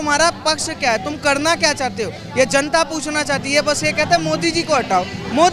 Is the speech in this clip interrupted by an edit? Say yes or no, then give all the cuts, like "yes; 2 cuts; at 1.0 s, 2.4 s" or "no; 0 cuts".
no; 0 cuts